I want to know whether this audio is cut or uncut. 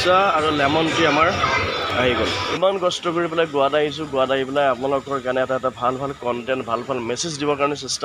cut